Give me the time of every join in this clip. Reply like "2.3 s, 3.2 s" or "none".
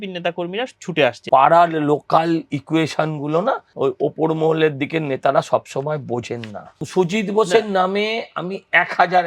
1.2 s, 3.7 s, 6.9 s